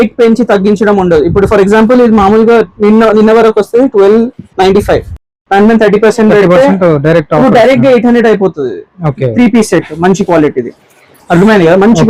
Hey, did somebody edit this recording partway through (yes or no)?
no